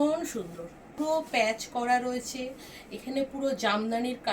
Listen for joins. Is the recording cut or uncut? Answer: cut